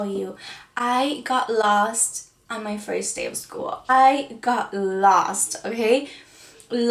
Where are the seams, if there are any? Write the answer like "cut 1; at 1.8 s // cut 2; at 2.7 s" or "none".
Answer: cut 1; at 3.9 s